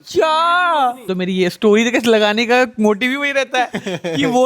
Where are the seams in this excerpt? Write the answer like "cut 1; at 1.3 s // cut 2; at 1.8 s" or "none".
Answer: cut 1; at 1.0 s